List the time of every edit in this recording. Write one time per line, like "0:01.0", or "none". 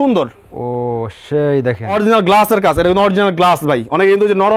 0:01.9